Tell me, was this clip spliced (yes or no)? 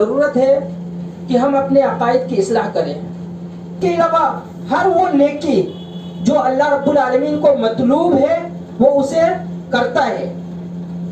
yes